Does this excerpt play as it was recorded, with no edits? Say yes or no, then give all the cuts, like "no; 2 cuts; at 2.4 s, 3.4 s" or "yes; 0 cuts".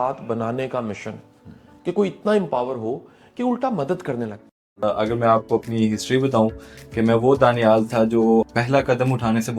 no; 1 cut; at 4.7 s